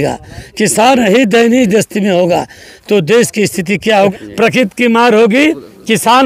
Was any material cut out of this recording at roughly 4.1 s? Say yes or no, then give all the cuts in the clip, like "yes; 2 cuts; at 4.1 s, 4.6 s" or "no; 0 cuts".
yes; 1 cut; at 4.1 s